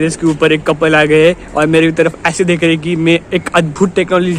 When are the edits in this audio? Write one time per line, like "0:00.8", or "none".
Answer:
none